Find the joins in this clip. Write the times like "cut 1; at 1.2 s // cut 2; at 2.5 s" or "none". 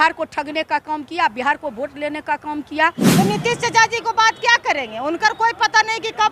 cut 1; at 3.0 s

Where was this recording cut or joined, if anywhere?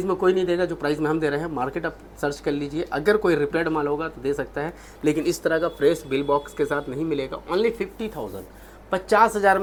none

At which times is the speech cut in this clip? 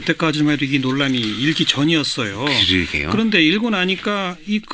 cut 1; at 2.3 s

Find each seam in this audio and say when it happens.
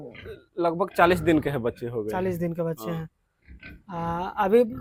none

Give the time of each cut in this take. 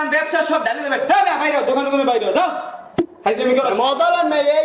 none

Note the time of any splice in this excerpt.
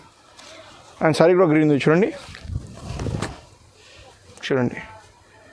none

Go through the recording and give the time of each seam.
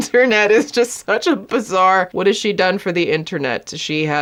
none

